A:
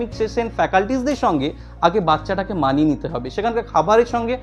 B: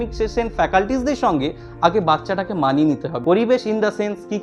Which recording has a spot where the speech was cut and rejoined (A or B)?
B